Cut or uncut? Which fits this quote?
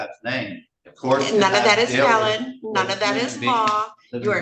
uncut